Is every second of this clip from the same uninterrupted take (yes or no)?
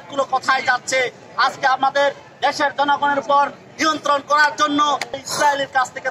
no